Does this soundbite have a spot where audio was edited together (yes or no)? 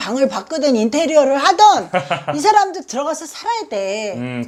no